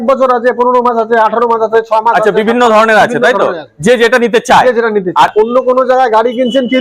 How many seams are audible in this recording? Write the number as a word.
one